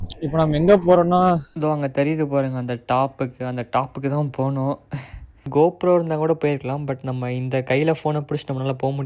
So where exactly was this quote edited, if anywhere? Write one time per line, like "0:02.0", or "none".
0:01.5
0:05.5

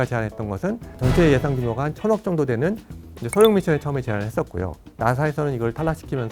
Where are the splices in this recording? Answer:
0:00.9
0:04.8

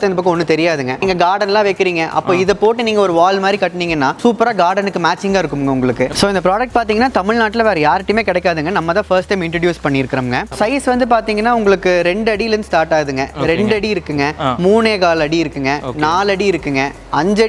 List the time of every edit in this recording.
0:01.0
0:04.2
0:06.1
0:10.5

